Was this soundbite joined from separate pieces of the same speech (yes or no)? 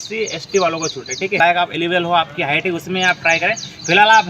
yes